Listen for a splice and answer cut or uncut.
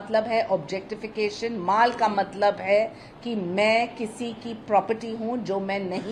uncut